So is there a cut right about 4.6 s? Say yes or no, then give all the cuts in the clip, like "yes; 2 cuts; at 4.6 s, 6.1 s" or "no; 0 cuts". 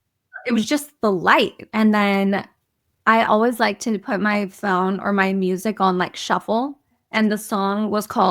no; 2 cuts; at 1.6 s, 7.0 s